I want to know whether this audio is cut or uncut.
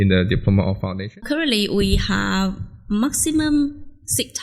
cut